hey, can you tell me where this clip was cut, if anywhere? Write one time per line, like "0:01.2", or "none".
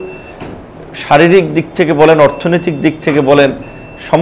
none